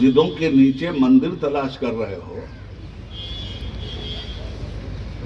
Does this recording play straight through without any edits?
yes; 0 cuts

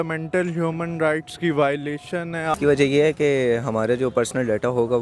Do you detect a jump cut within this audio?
yes; 1 cut; at 2.5 s

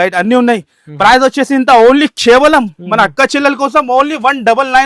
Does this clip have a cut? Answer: no; 0 cuts

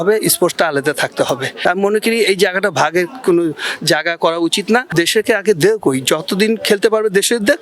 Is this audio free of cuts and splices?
no; 2 cuts; at 1.5 s, 4.9 s

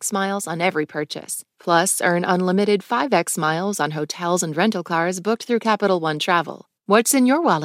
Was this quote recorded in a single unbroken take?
no; 1 cut; at 6.6 s

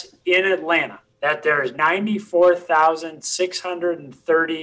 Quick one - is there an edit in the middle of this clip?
yes; 1 cut; at 1.0 s

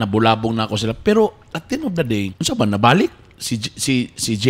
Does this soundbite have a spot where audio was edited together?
yes; 1 cut; at 2.4 s

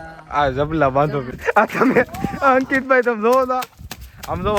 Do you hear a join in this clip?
yes; 1 cut; at 1.2 s

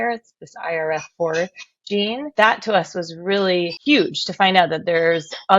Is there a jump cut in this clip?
yes; 1 cut; at 2.3 s

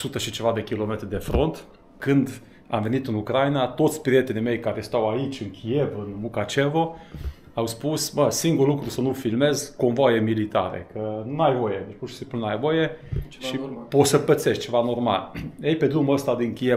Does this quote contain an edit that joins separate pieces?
yes; 1 cut; at 2.0 s

